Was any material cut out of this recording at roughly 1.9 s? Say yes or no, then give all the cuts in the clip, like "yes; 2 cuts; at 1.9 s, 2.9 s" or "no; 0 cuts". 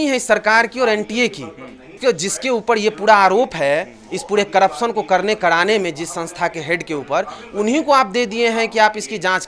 yes; 1 cut; at 1.9 s